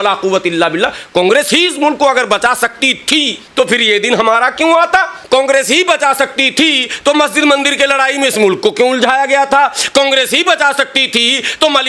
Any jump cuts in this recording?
yes; 2 cuts; at 3.4 s, 5.2 s

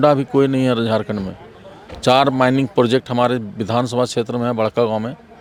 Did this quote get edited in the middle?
no; 0 cuts

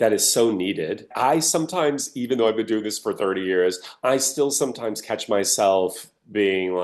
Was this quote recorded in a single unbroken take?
no; 1 cut; at 1.1 s

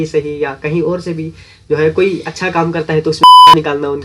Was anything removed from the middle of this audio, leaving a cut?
no; 0 cuts

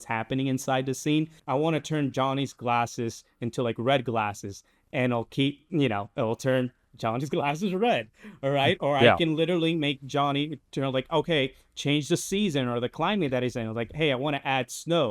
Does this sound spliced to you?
yes; 1 cut; at 1.4 s

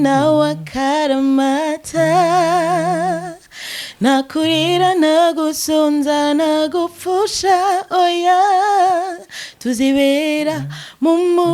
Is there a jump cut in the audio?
no; 0 cuts

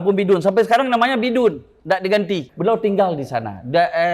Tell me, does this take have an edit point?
yes; 1 cut; at 2.5 s

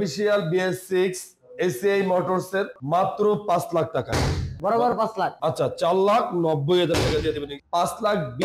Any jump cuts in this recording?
yes; 2 cuts; at 2.8 s, 7.5 s

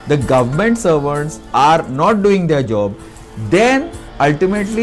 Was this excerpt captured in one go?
yes; 0 cuts

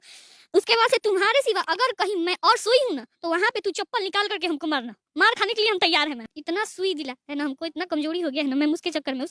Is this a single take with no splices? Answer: yes; 0 cuts

